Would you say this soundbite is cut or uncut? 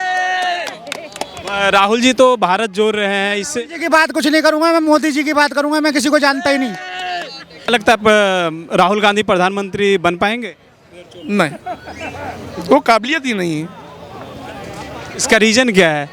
cut